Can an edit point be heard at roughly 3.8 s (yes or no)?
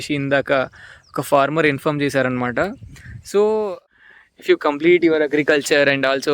yes